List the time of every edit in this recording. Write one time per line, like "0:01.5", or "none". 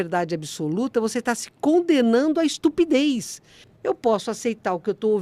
0:03.7